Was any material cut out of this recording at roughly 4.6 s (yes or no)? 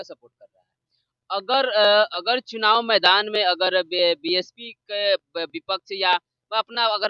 no